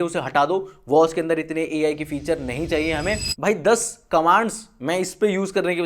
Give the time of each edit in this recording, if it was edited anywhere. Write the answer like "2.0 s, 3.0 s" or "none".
3.3 s